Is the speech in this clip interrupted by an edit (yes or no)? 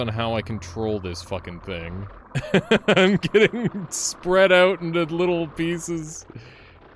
yes